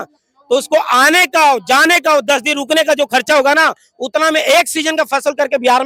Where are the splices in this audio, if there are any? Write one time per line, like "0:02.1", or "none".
none